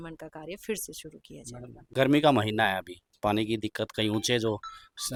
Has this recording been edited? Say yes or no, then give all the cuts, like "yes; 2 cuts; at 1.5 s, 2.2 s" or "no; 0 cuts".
no; 0 cuts